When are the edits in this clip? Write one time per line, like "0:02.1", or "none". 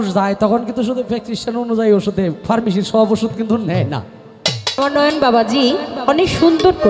0:04.6

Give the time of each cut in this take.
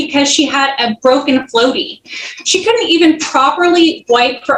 none

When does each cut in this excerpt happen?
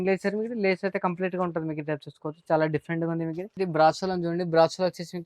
0:03.5

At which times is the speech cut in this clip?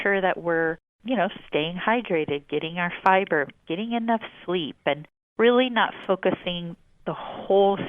0:00.9
0:05.2

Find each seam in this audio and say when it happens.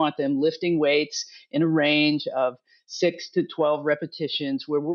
none

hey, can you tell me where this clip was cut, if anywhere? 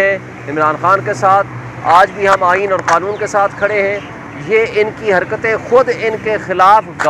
none

